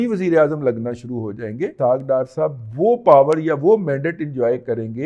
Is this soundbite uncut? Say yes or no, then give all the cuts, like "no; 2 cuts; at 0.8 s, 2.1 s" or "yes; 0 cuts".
no; 1 cut; at 1.7 s